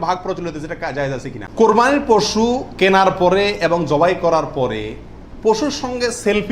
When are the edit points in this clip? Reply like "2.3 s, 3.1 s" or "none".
1.4 s